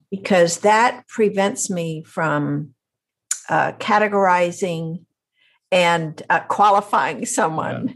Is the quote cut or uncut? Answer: uncut